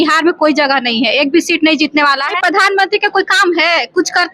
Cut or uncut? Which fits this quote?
cut